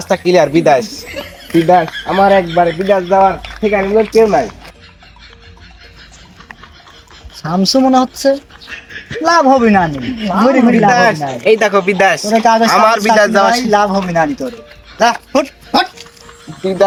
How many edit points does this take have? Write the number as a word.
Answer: zero